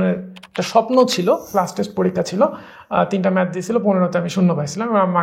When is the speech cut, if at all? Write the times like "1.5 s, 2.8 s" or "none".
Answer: 1.5 s